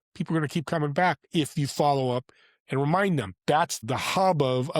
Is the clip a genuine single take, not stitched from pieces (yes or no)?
no